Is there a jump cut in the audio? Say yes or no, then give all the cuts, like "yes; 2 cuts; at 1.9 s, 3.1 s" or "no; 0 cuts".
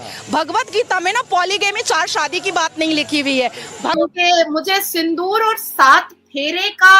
yes; 1 cut; at 4.0 s